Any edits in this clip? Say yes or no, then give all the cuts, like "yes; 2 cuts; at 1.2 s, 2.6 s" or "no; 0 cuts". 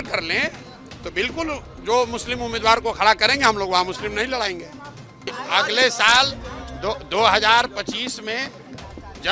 yes; 1 cut; at 5.3 s